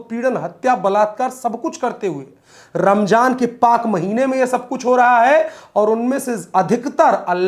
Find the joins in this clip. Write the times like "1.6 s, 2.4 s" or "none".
none